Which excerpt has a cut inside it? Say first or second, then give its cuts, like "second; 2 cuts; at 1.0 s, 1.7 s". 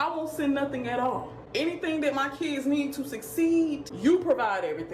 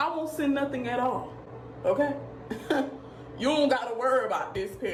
first; 2 cuts; at 1.4 s, 3.9 s